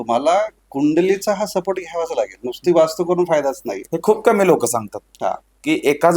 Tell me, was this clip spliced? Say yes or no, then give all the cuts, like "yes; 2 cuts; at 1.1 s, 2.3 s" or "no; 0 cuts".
no; 0 cuts